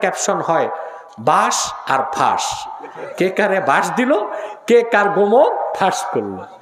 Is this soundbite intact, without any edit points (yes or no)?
yes